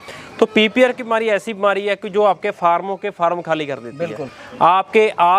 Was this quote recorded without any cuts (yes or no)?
yes